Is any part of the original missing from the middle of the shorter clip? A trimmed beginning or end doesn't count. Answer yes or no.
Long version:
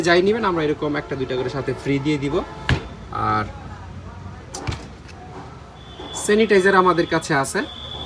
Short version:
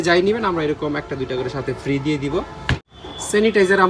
yes